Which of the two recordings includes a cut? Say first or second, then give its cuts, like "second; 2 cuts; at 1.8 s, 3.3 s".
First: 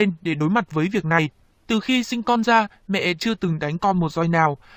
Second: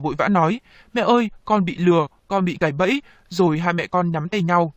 first; 1 cut; at 2.0 s